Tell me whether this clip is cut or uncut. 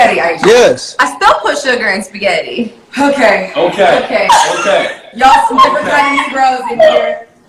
uncut